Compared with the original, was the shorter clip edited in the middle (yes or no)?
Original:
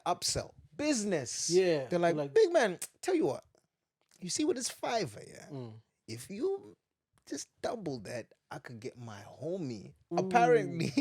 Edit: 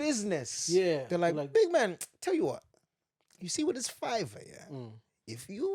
no